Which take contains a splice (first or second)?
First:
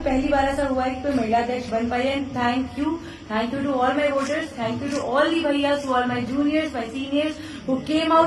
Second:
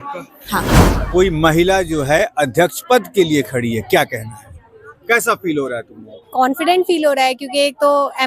second